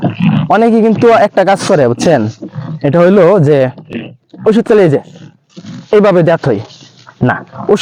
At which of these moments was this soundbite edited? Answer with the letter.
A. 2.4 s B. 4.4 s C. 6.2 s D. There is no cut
D